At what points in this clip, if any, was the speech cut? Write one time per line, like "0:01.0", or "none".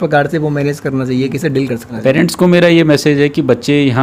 0:01.9